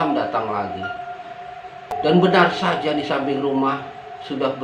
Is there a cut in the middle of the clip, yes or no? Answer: yes